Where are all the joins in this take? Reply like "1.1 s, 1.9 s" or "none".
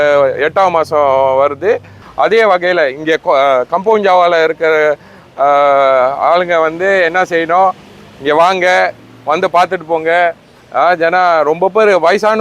2.0 s